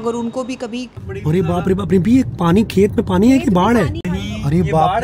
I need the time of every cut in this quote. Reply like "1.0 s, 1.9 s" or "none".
1.1 s, 4.0 s